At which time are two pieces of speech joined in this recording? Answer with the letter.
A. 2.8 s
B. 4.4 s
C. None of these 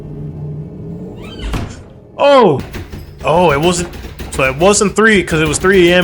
A